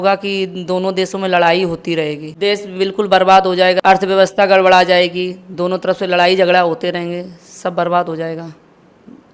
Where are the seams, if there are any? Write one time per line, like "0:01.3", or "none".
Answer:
0:02.3
0:03.8